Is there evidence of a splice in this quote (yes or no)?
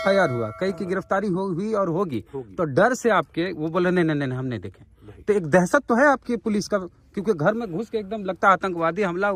no